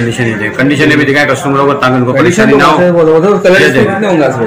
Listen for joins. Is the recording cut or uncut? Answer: uncut